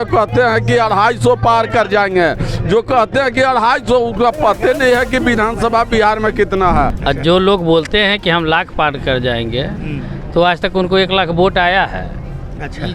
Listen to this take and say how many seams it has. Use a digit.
1